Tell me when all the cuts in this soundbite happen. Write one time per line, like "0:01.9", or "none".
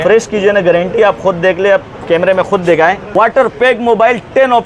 0:03.0